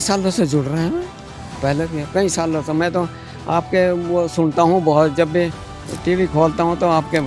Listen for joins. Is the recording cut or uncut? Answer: uncut